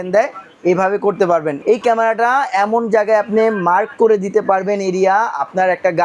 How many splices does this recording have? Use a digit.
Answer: 1